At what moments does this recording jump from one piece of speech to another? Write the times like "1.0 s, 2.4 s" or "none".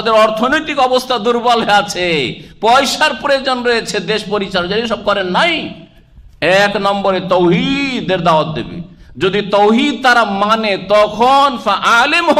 none